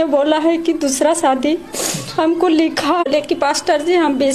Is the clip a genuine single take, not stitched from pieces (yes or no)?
no